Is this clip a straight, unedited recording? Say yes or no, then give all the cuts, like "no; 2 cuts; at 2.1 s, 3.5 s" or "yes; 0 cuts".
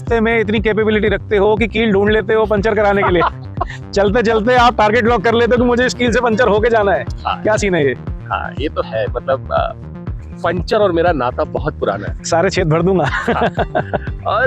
yes; 0 cuts